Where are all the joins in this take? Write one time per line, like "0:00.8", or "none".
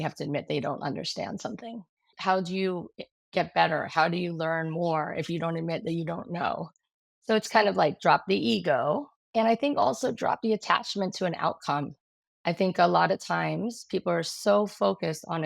0:02.1